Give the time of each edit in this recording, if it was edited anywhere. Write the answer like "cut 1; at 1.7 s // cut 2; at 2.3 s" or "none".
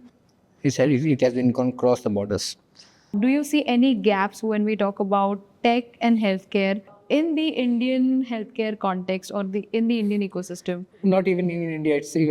cut 1; at 3.1 s